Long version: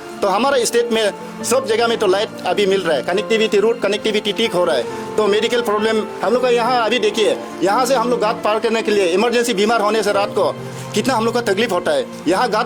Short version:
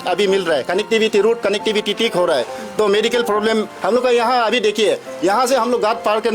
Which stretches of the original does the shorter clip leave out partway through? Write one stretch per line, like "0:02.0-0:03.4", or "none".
none